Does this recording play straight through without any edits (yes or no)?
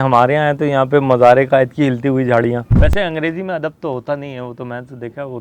no